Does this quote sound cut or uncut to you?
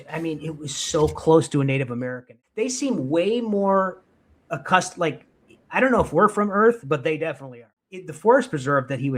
cut